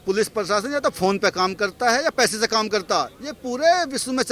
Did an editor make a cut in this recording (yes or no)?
no